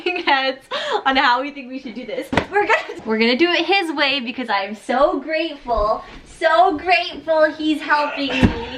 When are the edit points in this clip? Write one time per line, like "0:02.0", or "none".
none